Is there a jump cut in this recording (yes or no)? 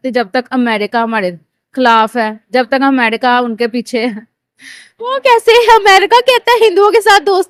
no